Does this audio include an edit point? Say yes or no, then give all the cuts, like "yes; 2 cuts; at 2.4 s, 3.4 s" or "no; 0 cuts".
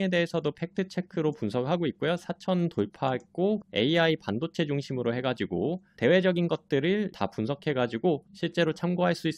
yes; 3 cuts; at 3.6 s, 5.9 s, 7.1 s